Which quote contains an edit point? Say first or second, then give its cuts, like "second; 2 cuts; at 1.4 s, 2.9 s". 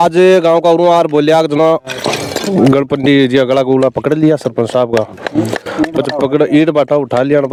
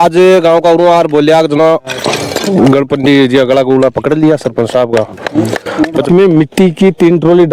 second; 1 cut; at 6.1 s